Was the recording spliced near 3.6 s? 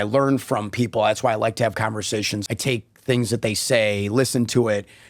no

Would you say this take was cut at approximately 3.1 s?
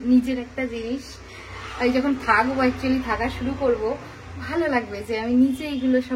no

